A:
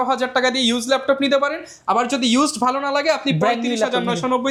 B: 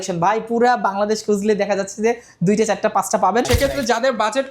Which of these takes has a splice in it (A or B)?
B